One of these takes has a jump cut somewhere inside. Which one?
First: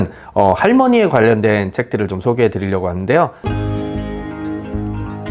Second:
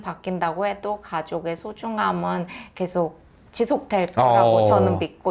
first; 1 cut; at 3.4 s

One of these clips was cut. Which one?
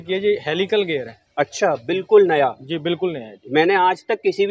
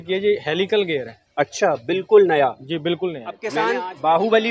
second; 1 cut; at 3.5 s

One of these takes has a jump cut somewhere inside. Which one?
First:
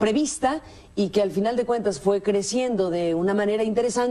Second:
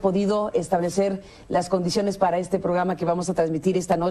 first; 1 cut; at 2.2 s

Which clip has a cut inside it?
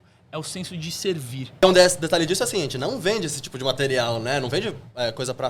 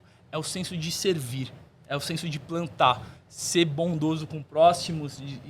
first; 1 cut; at 1.6 s

